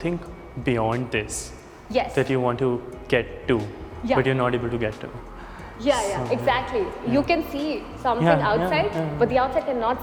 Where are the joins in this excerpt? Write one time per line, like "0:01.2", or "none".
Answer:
none